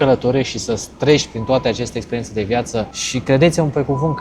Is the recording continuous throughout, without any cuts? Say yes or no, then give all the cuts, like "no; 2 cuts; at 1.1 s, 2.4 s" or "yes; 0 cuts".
no; 1 cut; at 3.0 s